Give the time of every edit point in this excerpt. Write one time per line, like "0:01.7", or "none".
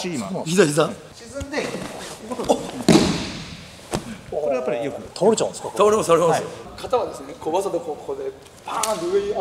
0:01.1
0:06.7